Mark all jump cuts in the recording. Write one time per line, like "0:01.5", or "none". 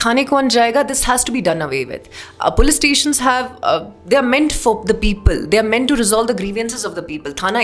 none

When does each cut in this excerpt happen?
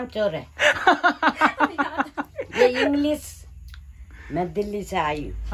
none

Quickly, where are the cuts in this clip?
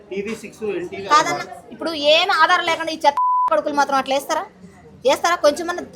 none

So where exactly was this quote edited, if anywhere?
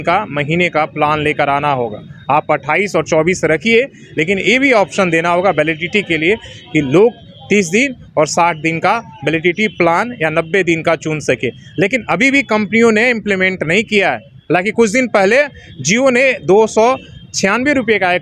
none

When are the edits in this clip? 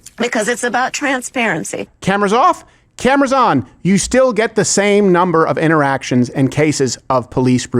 0:01.9

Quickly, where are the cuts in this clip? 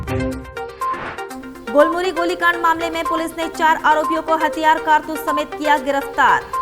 none

